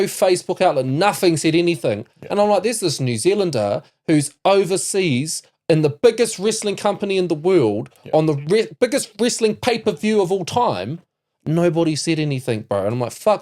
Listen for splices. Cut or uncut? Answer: uncut